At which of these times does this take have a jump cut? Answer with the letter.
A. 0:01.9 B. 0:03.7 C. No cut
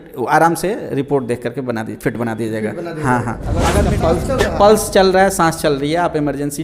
B